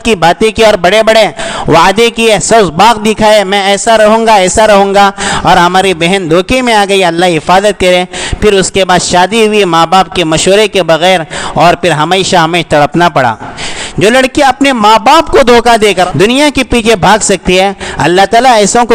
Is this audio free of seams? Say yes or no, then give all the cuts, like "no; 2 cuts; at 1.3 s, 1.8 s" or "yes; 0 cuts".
yes; 0 cuts